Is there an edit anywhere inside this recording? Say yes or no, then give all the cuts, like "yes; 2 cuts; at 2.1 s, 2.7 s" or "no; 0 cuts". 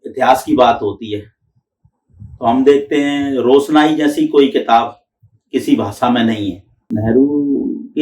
yes; 1 cut; at 6.8 s